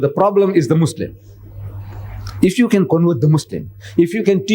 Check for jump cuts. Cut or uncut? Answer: cut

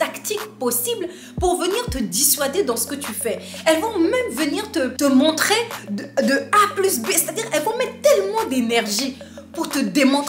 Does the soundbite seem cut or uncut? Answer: cut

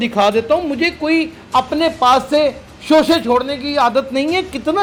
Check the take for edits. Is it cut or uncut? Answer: uncut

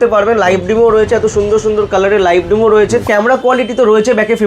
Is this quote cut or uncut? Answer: cut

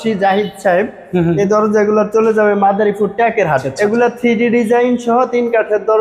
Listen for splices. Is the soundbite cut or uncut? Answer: cut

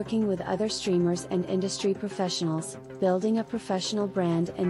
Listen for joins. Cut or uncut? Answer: uncut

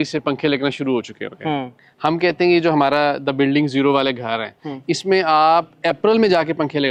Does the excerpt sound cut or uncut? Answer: uncut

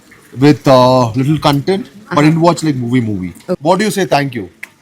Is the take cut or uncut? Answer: cut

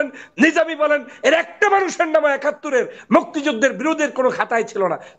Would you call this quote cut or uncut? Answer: uncut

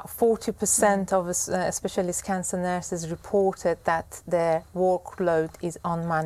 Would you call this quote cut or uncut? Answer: uncut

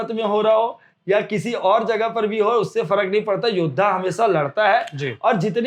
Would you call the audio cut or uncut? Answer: uncut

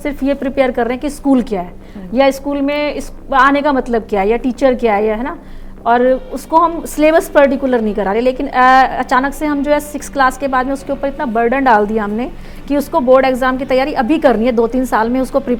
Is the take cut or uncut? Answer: uncut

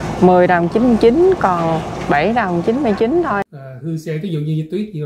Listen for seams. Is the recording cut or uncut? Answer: cut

